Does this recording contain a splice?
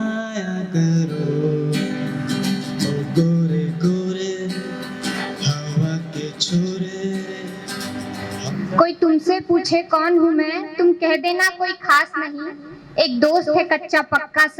yes; 1 cut; at 8.4 s

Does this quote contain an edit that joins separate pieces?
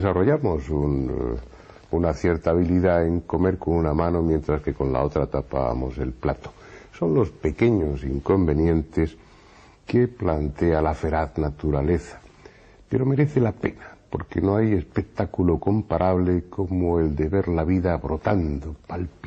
yes; 1 cut; at 17.4 s

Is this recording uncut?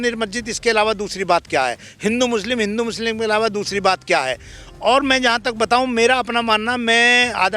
yes; 0 cuts

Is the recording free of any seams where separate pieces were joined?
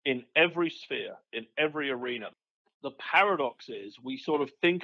no; 1 cut; at 2.2 s

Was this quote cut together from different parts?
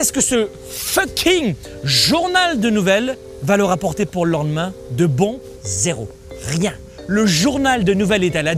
yes; 3 cuts; at 3.3 s, 5.4 s, 6.9 s

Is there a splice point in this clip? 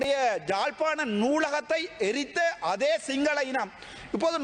no; 0 cuts

